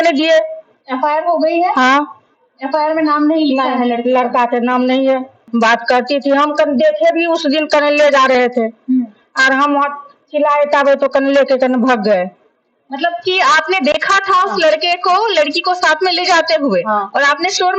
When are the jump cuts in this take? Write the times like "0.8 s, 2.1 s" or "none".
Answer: 5.5 s